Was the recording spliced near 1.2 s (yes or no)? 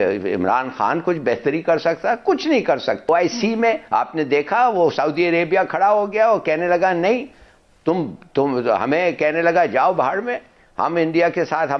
no